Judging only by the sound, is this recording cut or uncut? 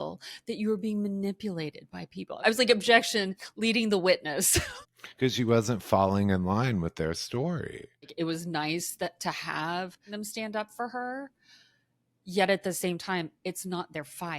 cut